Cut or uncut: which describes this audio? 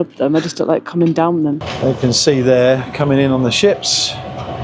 cut